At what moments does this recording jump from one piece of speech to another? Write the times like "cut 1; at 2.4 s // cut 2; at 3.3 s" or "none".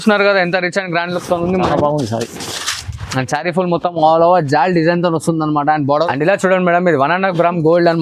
cut 1; at 5.9 s